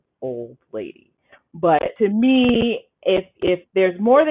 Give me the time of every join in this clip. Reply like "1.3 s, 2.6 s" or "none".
1.9 s